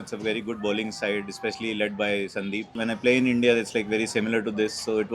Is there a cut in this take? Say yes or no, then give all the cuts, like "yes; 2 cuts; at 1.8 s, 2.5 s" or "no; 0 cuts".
yes; 1 cut; at 2.7 s